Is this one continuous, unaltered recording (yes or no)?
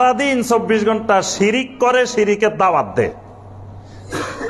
yes